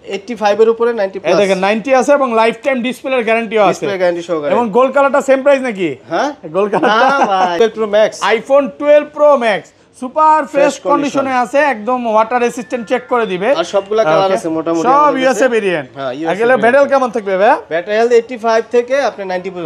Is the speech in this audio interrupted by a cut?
yes; 1 cut; at 7.6 s

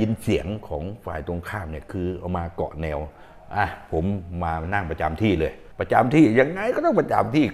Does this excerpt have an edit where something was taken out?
no; 0 cuts

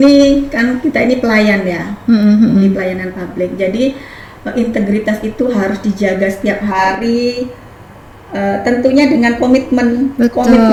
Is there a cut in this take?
no; 0 cuts

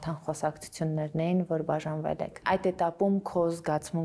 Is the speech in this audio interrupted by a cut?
no; 0 cuts

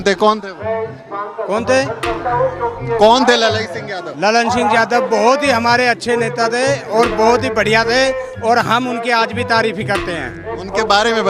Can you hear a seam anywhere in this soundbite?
no; 0 cuts

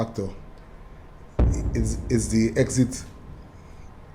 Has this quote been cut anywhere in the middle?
no; 0 cuts

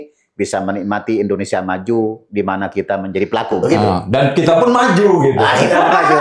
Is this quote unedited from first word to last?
yes; 0 cuts

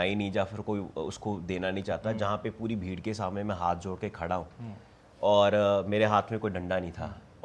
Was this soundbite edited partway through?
no; 0 cuts

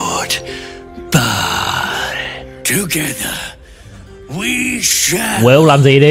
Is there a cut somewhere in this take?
no; 0 cuts

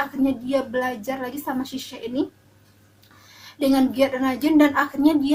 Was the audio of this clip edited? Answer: no; 0 cuts

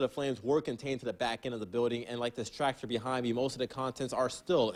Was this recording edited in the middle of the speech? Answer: no; 0 cuts

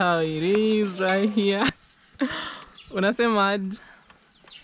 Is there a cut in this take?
yes; 1 cut; at 1.8 s

